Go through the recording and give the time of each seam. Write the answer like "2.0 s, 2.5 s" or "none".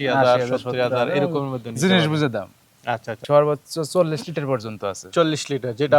3.1 s